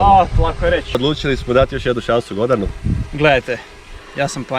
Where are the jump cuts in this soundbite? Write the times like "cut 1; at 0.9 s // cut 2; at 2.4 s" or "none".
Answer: cut 1; at 0.9 s